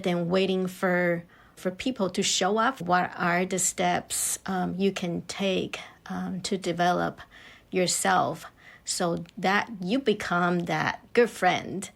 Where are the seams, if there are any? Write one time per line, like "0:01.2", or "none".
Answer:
0:02.8
0:11.0